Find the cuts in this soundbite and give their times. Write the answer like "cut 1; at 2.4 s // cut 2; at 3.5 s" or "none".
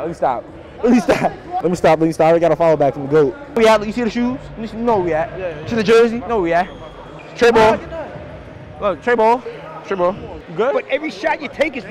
cut 1; at 1.5 s // cut 2; at 3.4 s // cut 3; at 10.4 s